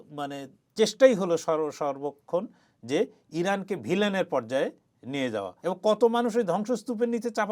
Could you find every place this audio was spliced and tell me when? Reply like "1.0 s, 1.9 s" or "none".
5.5 s